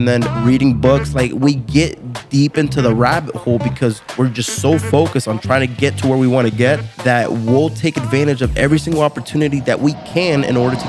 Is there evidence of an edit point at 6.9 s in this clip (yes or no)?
yes